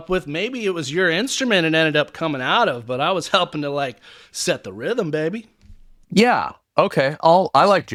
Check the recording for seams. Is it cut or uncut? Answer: uncut